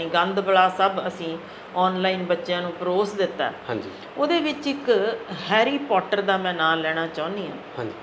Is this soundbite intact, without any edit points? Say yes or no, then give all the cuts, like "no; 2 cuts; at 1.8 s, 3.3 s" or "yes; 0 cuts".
yes; 0 cuts